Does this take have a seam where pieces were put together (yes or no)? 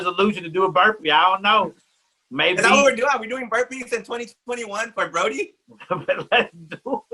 no